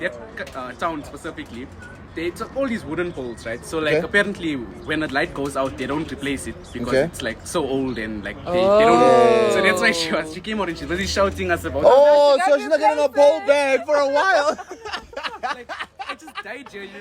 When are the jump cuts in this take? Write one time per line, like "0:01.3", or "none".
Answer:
none